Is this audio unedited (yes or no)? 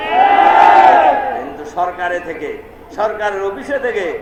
yes